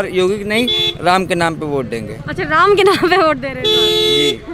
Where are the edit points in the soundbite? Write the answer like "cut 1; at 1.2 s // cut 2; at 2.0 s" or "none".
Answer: none